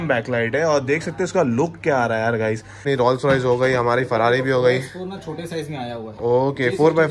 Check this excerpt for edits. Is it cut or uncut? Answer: uncut